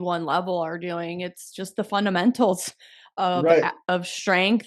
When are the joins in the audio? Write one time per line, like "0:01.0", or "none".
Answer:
none

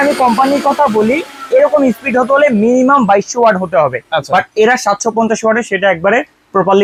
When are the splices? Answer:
none

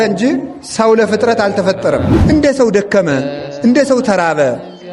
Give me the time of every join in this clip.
0:02.1

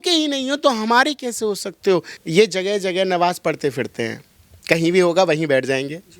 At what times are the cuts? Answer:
0:02.2

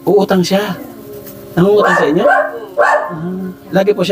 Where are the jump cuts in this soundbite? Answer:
none

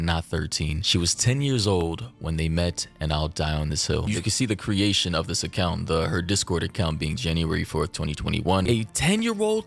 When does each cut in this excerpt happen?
0:04.1
0:08.6

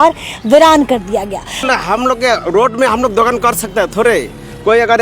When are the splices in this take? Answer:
0:01.6

